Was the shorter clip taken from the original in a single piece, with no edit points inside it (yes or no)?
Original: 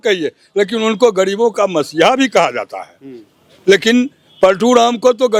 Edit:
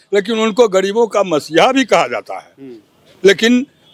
yes